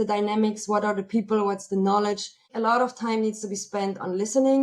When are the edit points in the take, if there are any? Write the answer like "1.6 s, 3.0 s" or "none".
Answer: 2.5 s